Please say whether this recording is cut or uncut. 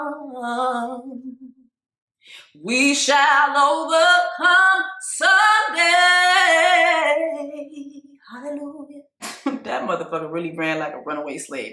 cut